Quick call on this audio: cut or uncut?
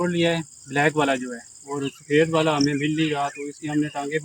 uncut